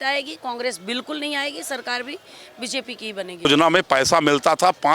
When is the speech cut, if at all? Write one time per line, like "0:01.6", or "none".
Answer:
0:03.4